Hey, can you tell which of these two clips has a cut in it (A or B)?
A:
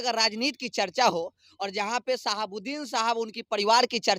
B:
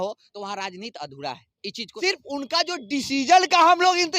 B